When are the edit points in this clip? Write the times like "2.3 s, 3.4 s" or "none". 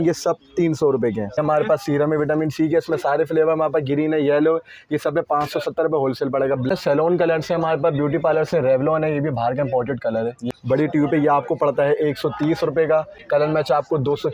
1.4 s, 6.7 s, 10.4 s, 13.2 s